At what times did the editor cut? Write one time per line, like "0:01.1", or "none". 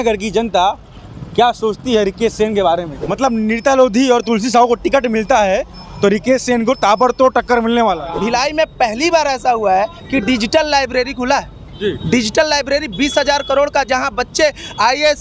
0:03.0
0:08.1